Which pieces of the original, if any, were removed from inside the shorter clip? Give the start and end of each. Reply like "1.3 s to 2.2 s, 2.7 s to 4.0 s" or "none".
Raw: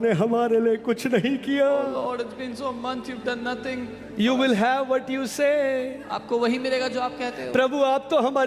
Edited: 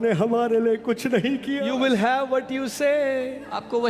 1.6 s to 4.2 s